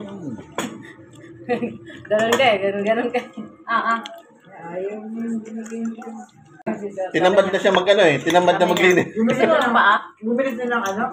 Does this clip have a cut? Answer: yes; 1 cut; at 6.6 s

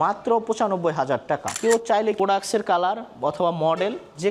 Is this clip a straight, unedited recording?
no; 2 cuts; at 1.5 s, 2.2 s

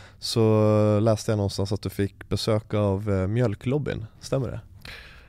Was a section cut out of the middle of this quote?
no; 0 cuts

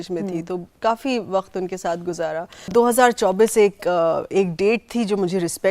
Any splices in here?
yes; 1 cut; at 2.7 s

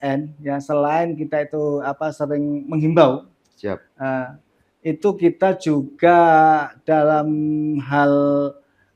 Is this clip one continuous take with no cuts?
yes; 0 cuts

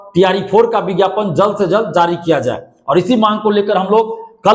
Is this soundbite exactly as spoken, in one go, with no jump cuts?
yes; 0 cuts

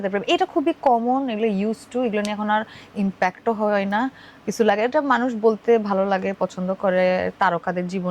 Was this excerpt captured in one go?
yes; 0 cuts

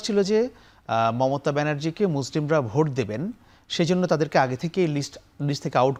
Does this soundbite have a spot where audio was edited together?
no; 0 cuts

